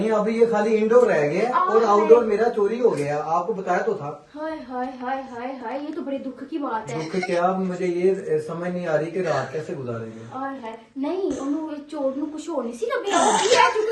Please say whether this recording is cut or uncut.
uncut